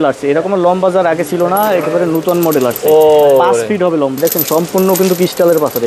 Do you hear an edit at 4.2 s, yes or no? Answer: yes